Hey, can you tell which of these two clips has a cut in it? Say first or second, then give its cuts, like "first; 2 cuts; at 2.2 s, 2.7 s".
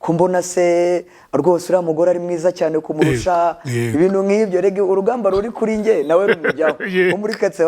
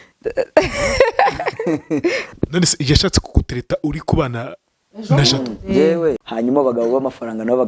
second; 2 cuts; at 2.2 s, 6.2 s